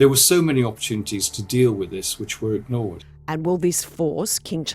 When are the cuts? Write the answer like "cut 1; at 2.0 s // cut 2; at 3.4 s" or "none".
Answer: cut 1; at 3.1 s